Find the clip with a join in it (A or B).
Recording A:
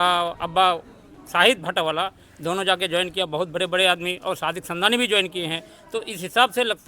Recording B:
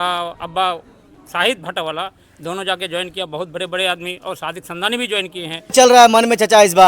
B